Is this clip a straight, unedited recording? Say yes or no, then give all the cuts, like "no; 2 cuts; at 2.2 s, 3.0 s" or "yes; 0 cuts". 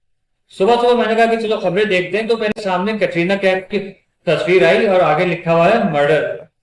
yes; 0 cuts